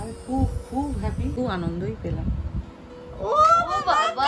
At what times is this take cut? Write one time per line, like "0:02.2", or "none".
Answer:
0:01.3